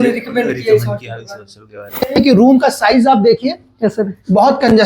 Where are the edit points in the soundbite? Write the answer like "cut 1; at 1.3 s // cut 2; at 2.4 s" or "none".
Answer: cut 1; at 1.9 s